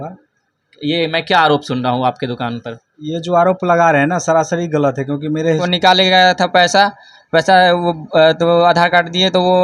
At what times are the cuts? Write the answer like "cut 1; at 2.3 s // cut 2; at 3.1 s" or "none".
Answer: cut 1; at 5.7 s